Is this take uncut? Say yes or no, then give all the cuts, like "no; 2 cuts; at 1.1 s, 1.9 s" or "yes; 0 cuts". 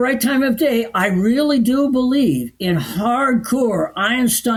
yes; 0 cuts